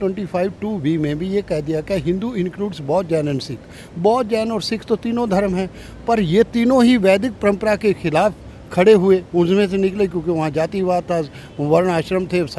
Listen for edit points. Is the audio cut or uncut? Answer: uncut